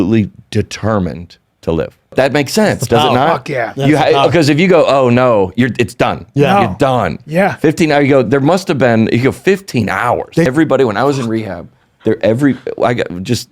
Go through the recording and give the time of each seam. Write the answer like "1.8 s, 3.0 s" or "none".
2.1 s, 10.5 s